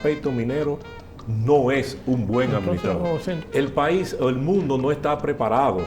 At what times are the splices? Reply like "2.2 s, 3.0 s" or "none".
3.4 s